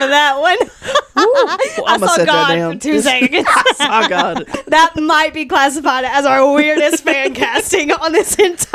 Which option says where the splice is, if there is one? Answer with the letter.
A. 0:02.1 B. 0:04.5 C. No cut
B